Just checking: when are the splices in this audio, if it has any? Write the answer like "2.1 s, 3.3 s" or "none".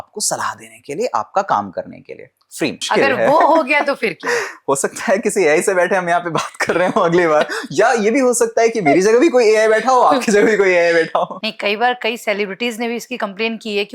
2.8 s, 11.4 s